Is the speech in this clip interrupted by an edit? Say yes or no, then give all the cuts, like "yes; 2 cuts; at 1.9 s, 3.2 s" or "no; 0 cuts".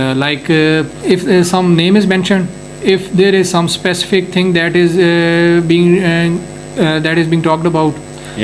yes; 1 cut; at 0.9 s